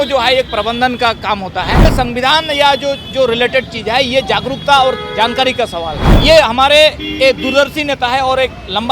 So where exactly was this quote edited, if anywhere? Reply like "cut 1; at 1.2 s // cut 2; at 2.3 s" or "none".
cut 1; at 1.9 s // cut 2; at 6.1 s